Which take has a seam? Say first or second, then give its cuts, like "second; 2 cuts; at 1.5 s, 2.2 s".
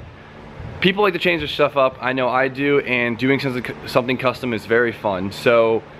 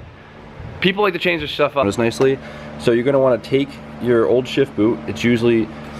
first; 1 cut; at 1.8 s